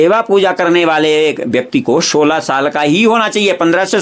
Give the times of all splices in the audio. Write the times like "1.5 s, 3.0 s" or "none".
none